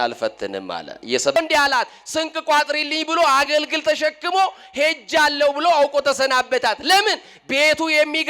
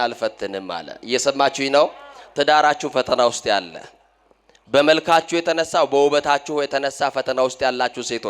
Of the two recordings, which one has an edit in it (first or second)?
first